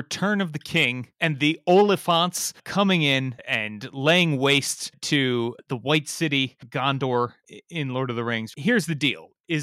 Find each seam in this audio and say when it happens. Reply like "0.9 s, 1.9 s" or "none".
1.1 s, 3.4 s, 7.4 s